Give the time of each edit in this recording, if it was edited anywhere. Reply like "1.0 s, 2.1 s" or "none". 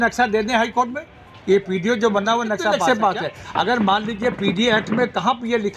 2.8 s